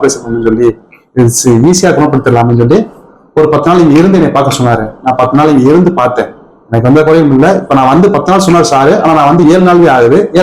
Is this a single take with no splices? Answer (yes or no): yes